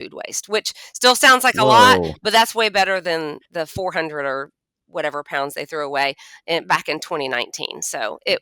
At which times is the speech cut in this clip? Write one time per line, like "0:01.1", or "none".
none